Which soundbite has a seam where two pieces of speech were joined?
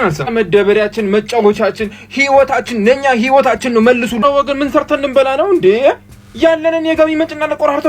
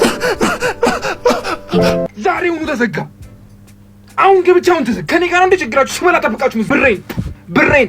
second; 1 cut; at 2.1 s

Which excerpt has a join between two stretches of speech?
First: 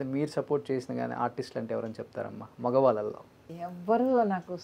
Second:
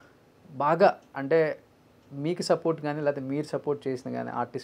first; 1 cut; at 3.5 s

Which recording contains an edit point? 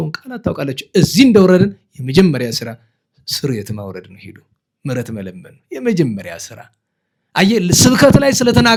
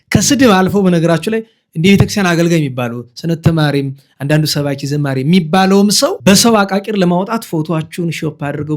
second; 1 cut; at 6.2 s

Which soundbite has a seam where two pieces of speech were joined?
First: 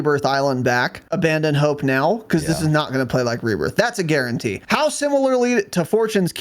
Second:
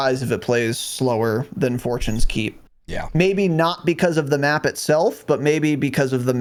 first; 2 cuts; at 1.0 s, 4.6 s

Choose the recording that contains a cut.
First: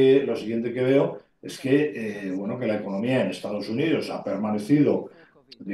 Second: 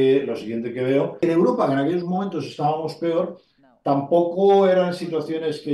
second; 1 cut; at 1.2 s

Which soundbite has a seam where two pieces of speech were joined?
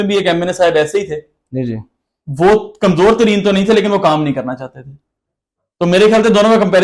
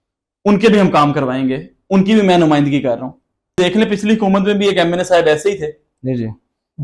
second; 1 cut; at 3.6 s

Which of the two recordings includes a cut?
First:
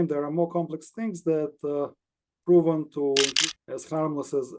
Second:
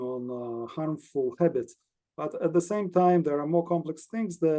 first; 1 cut; at 3.4 s

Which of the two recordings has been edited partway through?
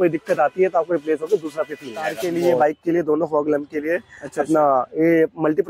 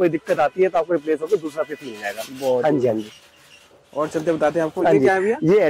first; 1 cut; at 2.2 s

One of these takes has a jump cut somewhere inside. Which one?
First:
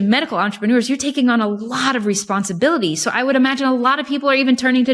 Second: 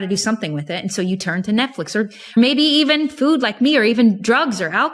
second; 1 cut; at 2.4 s

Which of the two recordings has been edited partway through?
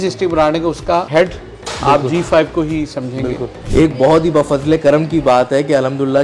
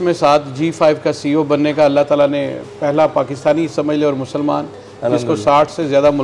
first; 1 cut; at 3.6 s

